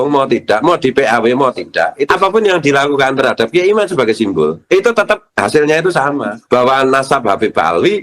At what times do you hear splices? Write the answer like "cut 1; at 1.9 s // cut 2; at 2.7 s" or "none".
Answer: cut 1; at 2.0 s // cut 2; at 4.6 s // cut 3; at 5.3 s // cut 4; at 6.3 s